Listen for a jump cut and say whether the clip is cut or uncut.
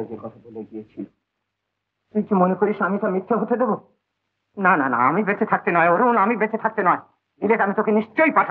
uncut